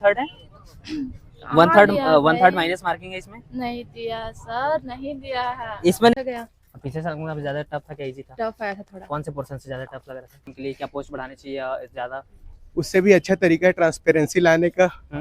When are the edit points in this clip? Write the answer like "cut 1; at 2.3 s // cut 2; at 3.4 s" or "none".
cut 1; at 6.1 s // cut 2; at 10.5 s